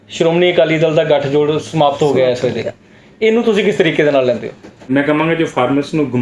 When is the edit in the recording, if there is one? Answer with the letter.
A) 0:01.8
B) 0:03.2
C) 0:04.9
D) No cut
C